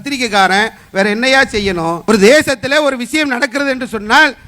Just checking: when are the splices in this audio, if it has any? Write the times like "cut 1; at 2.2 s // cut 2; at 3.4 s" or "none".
cut 1; at 2.0 s